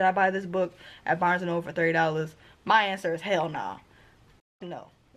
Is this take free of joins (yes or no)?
yes